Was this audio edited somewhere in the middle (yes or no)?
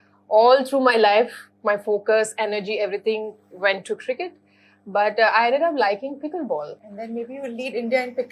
yes